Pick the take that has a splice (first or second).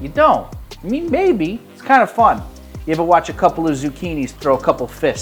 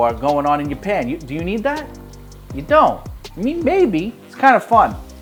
first